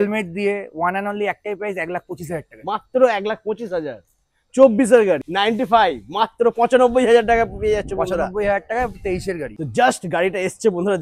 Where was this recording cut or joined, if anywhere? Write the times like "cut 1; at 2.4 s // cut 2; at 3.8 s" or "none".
cut 1; at 5.3 s // cut 2; at 9.5 s